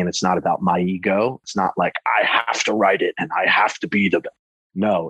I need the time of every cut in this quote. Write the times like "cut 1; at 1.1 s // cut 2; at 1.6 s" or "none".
cut 1; at 1.4 s